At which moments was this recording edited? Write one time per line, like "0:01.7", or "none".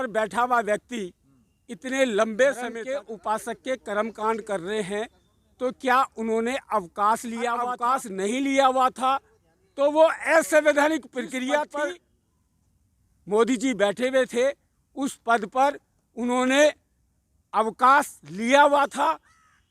0:02.8
0:07.8
0:11.7